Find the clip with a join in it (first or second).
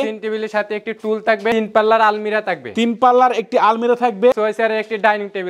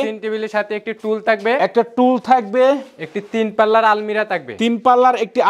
first